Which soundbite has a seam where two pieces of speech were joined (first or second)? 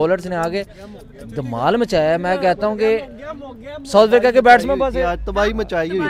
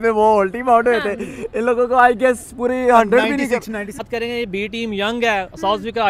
second